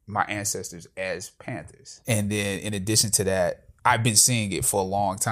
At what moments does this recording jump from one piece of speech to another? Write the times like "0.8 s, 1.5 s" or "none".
1.9 s, 3.7 s

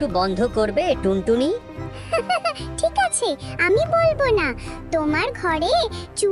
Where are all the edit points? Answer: none

